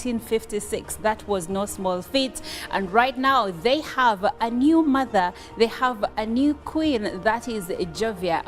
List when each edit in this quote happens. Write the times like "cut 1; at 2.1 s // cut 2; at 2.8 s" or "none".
cut 1; at 2.5 s // cut 2; at 3.7 s